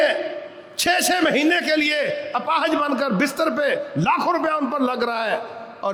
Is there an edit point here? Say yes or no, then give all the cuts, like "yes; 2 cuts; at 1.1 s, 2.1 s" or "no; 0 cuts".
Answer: no; 0 cuts